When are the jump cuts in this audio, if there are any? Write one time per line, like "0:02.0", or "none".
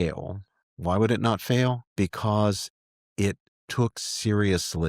0:01.8